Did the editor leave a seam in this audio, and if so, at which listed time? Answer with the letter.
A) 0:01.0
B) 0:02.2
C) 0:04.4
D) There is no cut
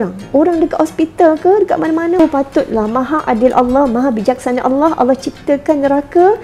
B